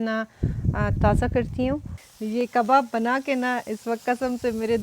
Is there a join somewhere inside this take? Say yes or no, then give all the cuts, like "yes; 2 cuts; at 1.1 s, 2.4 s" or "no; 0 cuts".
yes; 1 cut; at 1.9 s